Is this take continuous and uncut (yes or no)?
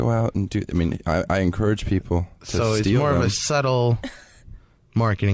yes